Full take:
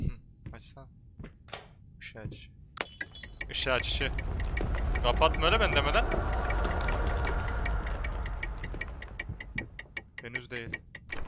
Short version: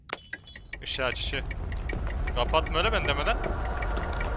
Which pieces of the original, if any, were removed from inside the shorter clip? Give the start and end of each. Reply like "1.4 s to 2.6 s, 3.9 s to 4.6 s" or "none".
none